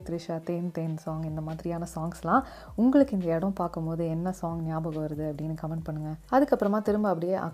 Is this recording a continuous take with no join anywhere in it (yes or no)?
yes